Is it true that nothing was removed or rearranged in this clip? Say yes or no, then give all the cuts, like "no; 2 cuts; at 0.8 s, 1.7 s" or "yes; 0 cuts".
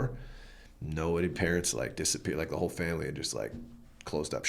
yes; 0 cuts